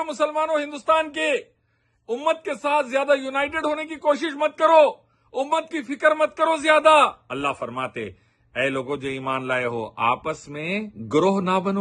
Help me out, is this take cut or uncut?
cut